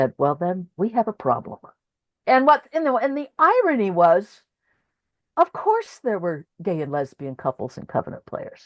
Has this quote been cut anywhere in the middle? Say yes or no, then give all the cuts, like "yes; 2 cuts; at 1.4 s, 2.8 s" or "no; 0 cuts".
yes; 1 cut; at 2.2 s